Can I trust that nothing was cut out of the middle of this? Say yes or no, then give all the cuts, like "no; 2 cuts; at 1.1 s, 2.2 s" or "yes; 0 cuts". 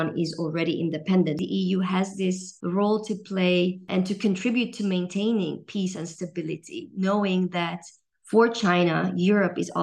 no; 3 cuts; at 1.4 s, 2.5 s, 3.9 s